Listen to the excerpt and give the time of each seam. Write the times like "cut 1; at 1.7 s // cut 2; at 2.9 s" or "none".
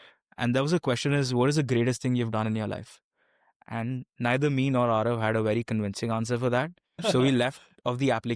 cut 1; at 7.0 s